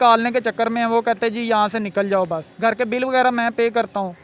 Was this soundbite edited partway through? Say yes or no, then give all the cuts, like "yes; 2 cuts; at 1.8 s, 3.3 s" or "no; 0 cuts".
yes; 1 cut; at 2.4 s